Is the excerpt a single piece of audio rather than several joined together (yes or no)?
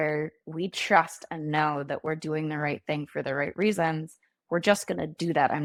yes